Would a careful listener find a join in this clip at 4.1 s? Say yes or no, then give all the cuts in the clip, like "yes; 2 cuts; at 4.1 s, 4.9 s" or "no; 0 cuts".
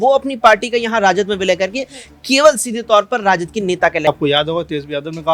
yes; 1 cut; at 4.1 s